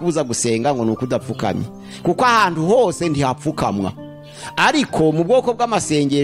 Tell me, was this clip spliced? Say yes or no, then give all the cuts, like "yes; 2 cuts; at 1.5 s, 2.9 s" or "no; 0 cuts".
no; 0 cuts